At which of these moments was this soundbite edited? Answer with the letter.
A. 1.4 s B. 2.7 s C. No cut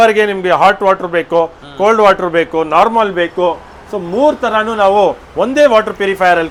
C